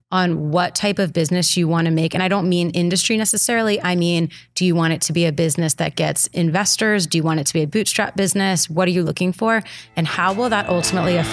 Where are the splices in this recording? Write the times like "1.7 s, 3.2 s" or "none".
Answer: none